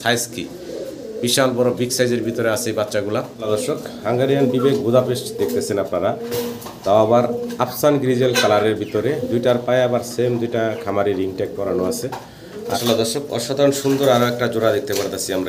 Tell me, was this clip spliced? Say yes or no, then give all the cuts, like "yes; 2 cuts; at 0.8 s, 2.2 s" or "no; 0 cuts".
yes; 2 cuts; at 3.3 s, 12.8 s